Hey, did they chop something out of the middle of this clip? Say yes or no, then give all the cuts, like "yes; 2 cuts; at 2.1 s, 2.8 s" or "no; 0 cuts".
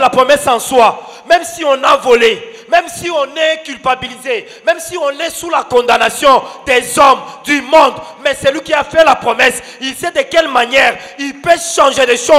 no; 0 cuts